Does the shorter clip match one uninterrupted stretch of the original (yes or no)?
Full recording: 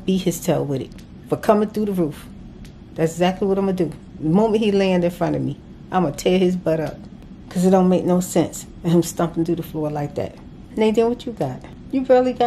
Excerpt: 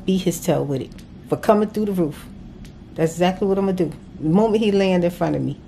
yes